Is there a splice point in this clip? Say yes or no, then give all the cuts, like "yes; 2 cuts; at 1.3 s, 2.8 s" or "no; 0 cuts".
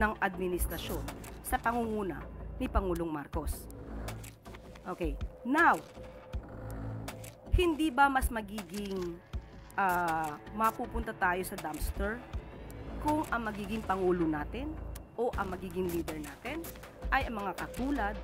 yes; 4 cuts; at 3.5 s, 4.8 s, 5.8 s, 7.5 s